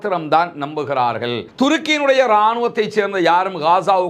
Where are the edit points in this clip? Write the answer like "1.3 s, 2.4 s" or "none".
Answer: 1.5 s